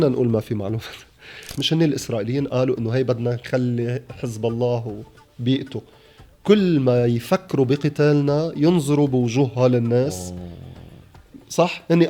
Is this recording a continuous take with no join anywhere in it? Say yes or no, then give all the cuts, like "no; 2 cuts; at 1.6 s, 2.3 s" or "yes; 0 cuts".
no; 1 cut; at 1.5 s